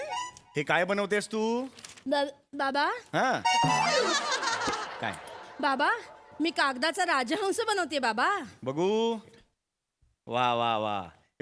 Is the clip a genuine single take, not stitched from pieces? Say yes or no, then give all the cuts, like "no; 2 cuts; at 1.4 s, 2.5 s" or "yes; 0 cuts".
yes; 0 cuts